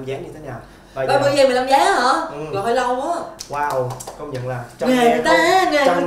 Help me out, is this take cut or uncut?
cut